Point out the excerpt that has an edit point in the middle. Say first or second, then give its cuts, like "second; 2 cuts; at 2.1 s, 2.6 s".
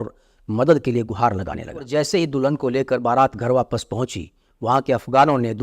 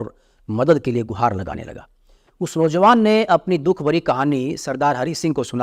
first; 1 cut; at 1.9 s